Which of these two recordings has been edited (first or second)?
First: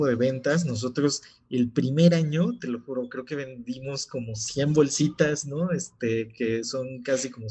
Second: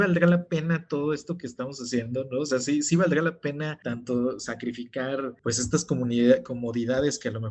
second